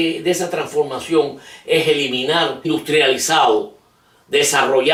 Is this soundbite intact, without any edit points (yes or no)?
yes